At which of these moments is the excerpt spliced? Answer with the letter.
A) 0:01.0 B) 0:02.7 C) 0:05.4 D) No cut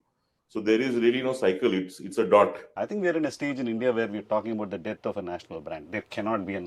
B